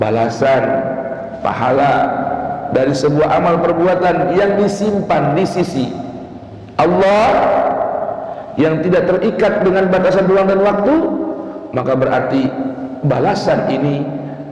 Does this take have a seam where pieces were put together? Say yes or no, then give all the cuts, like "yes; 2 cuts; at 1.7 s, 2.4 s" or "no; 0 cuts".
no; 0 cuts